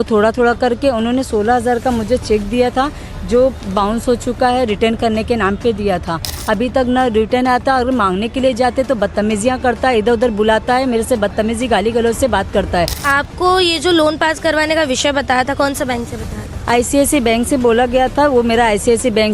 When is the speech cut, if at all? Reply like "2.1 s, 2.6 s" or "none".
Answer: 13.0 s